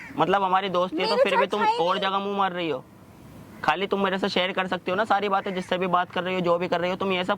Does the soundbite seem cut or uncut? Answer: uncut